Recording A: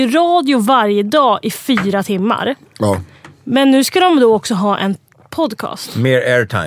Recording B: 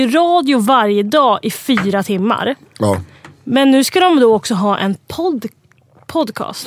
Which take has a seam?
A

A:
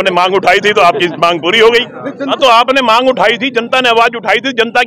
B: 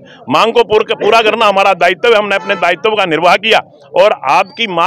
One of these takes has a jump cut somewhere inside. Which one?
A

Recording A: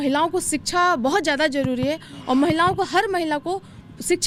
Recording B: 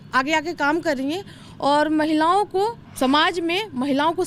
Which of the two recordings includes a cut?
B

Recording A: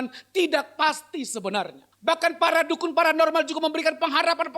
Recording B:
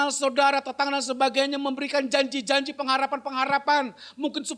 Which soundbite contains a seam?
A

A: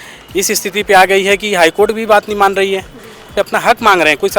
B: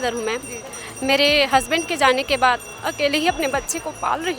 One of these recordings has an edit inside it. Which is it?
A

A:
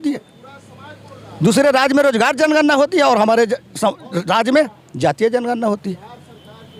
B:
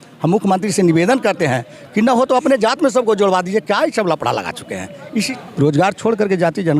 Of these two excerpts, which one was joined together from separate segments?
B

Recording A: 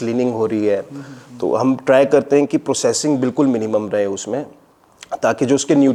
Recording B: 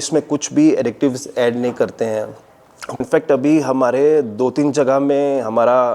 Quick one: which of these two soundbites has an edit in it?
B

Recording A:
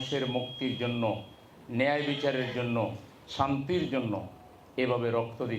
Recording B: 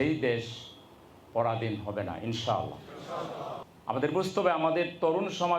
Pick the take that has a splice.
B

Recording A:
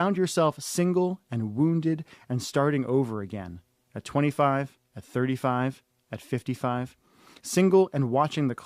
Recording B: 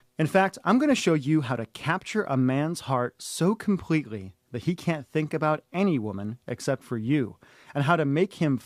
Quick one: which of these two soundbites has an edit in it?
A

